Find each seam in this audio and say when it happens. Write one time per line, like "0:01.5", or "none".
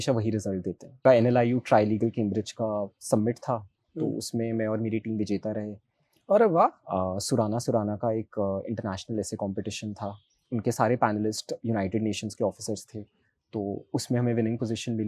0:01.0